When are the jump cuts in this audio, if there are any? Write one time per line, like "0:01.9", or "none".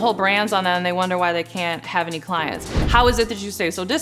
0:02.7